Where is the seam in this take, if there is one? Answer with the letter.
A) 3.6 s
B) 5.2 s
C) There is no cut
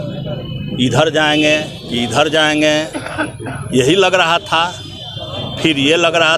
C